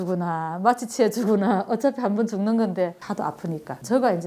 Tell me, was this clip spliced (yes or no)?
yes